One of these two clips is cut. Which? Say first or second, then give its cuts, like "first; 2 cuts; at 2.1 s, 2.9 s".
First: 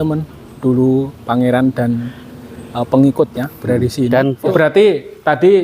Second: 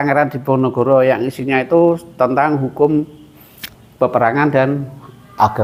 first; 1 cut; at 4.5 s